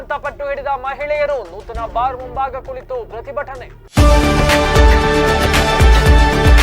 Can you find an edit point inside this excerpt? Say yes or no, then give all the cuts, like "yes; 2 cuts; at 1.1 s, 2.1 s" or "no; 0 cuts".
yes; 1 cut; at 3.7 s